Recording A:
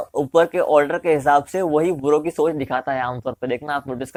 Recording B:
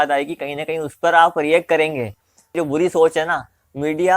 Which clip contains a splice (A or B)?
B